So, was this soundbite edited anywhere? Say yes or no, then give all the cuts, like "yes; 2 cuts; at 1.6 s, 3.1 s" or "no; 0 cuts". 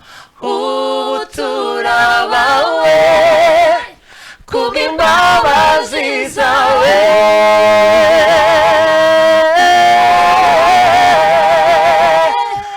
no; 0 cuts